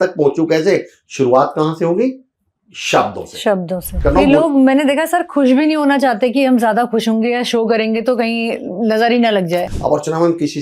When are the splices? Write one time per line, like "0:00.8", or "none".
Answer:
0:03.9
0:09.6